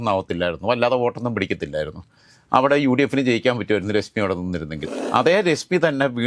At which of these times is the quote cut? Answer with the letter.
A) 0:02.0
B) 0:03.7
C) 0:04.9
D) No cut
C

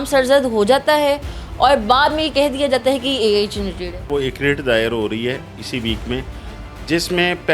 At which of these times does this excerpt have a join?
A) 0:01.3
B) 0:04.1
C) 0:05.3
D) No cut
B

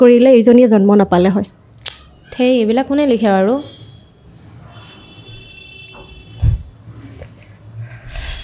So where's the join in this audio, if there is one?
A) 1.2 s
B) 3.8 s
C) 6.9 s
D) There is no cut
D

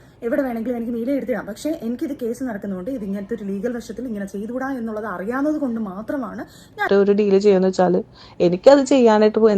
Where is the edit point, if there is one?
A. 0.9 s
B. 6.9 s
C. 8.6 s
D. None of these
B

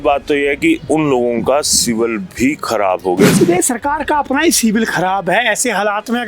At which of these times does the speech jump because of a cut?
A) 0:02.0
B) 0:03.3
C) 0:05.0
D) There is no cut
B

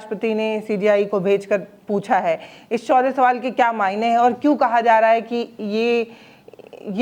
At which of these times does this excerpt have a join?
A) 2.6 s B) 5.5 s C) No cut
C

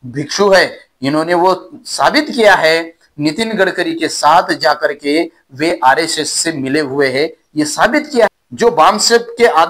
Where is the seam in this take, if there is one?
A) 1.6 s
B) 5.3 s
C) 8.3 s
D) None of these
C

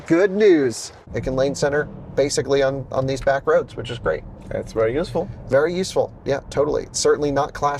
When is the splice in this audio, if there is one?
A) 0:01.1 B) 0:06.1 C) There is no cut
A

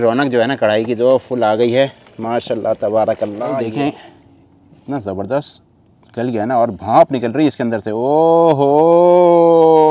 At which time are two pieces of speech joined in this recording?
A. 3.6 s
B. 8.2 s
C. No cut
A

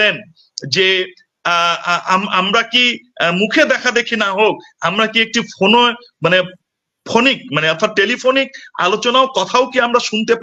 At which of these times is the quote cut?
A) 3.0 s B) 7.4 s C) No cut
C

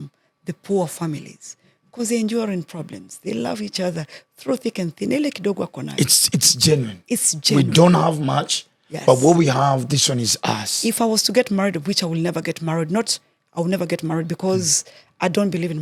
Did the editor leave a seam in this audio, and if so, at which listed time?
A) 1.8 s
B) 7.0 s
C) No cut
C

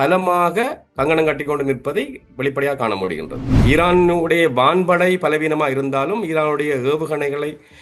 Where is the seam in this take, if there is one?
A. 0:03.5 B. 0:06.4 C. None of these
A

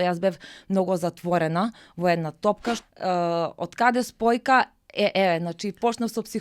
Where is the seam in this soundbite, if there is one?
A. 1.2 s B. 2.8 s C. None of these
B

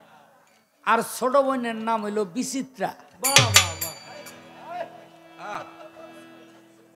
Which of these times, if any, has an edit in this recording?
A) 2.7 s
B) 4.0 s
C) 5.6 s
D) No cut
D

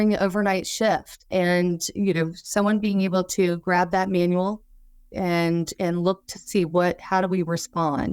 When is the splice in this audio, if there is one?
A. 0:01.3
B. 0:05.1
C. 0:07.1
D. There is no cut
A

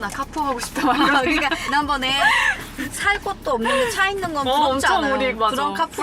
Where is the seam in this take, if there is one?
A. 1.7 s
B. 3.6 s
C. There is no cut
A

